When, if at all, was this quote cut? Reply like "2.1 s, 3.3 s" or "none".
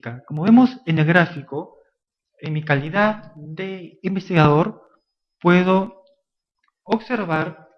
4.3 s